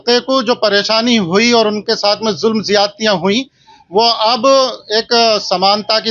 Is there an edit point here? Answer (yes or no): no